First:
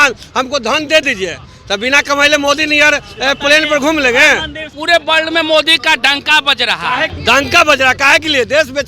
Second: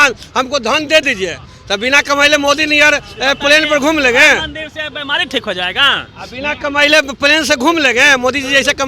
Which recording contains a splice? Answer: first; 2 cuts; at 4.8 s, 7.1 s

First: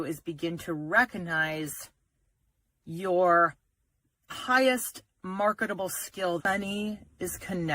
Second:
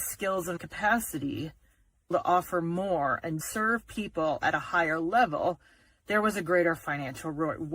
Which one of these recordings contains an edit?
first; 1 cut; at 6.4 s

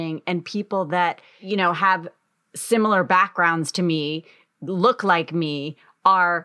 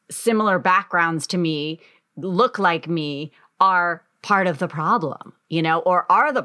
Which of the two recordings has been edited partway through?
first; 1 cut; at 1.3 s

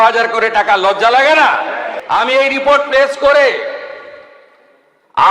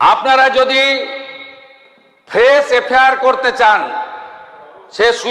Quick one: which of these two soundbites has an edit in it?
first; 1 cut; at 1.9 s

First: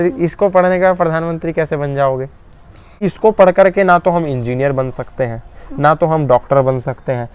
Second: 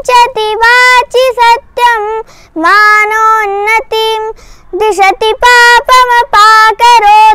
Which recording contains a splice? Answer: first; 1 cut; at 3.0 s

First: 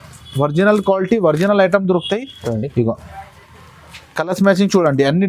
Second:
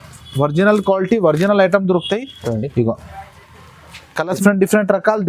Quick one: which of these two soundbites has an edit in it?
second; 1 cut; at 4.4 s

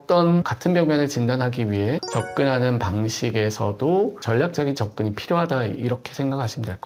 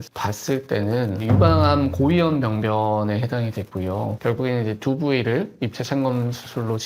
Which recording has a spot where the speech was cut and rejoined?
second; 1 cut; at 4.2 s

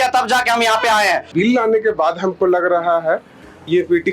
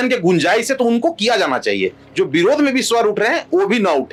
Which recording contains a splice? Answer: first; 1 cut; at 1.3 s

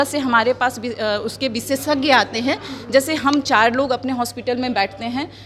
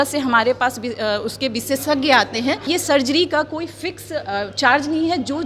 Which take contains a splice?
second; 1 cut; at 2.7 s

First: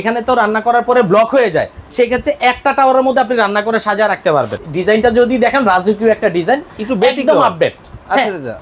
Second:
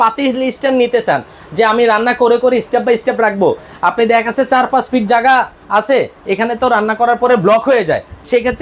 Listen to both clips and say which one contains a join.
first; 1 cut; at 4.5 s

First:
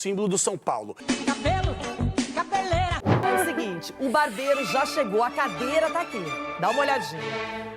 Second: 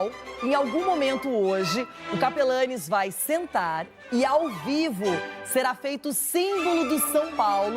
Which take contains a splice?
first; 1 cut; at 3.2 s

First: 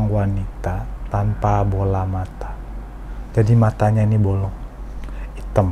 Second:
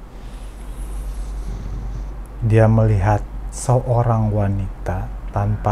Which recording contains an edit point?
second; 1 cut; at 2.3 s

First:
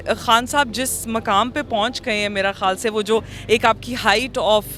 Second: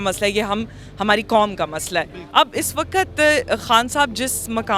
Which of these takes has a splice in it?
second; 1 cut; at 2.2 s

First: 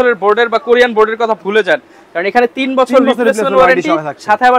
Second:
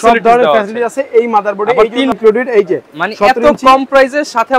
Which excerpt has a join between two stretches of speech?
second; 1 cut; at 2.1 s

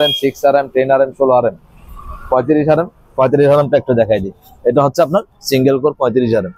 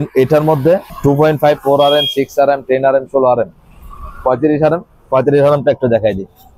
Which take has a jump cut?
second; 1 cut; at 0.9 s

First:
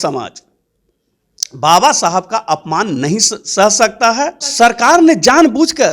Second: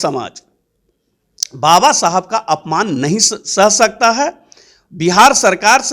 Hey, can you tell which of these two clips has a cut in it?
first; 1 cut; at 4.4 s

